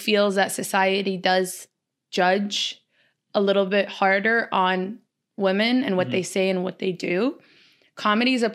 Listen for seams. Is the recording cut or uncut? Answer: uncut